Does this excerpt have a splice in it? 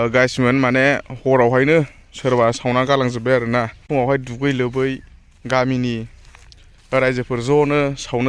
yes; 1 cut; at 3.8 s

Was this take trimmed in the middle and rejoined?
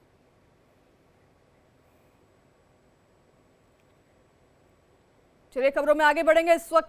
no; 0 cuts

